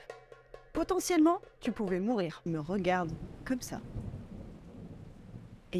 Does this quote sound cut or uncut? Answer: cut